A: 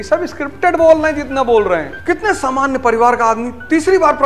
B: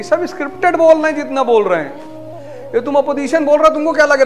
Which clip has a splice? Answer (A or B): A